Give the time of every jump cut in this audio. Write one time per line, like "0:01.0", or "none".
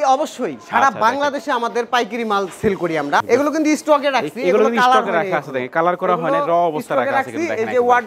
0:03.2